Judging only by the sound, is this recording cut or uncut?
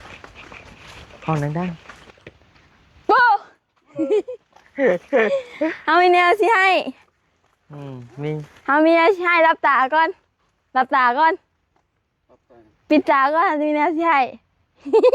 cut